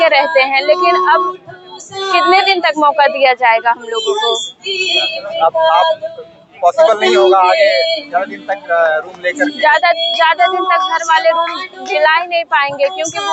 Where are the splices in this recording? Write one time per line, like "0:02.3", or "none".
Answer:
none